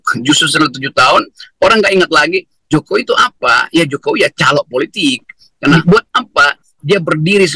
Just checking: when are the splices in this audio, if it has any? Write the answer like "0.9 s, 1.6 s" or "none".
5.7 s